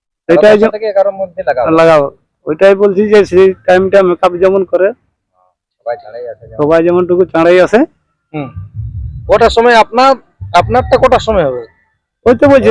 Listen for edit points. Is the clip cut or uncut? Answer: uncut